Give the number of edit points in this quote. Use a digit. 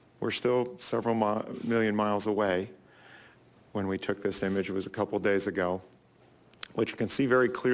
1